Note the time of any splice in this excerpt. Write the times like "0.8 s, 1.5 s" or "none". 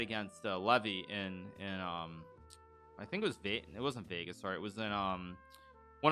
none